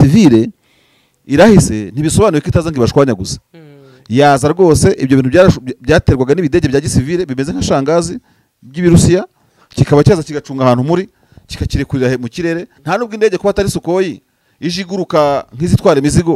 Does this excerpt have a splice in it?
yes; 1 cut; at 12.7 s

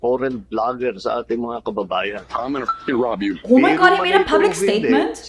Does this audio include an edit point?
no; 0 cuts

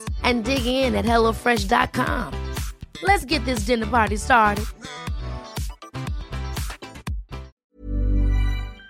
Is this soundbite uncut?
no; 1 cut; at 7.5 s

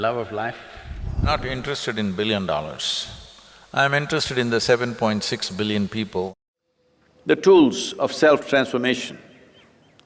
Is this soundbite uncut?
no; 2 cuts; at 1.2 s, 6.3 s

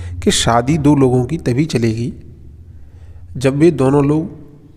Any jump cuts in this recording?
no; 0 cuts

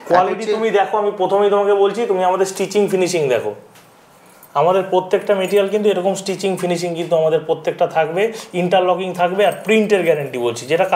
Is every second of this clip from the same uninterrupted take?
yes; 0 cuts

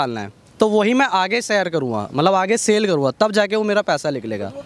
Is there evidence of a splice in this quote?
no; 0 cuts

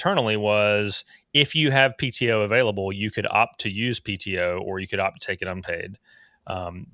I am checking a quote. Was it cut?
no; 0 cuts

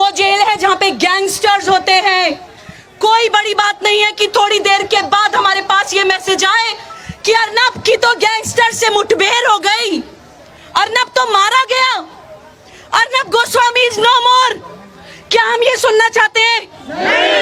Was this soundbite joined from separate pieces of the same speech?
no; 0 cuts

